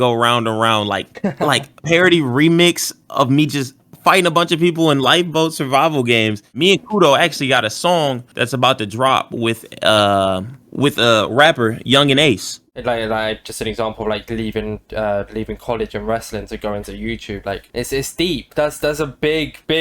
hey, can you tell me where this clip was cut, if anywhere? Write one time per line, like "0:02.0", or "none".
0:06.4
0:12.7